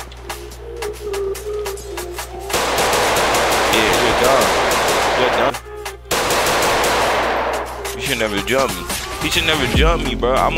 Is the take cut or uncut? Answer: cut